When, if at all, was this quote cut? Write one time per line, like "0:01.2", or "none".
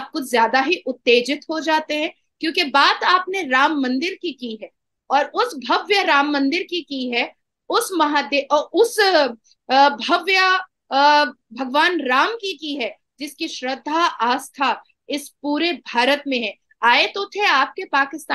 none